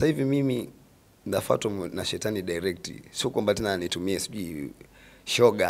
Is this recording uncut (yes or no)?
yes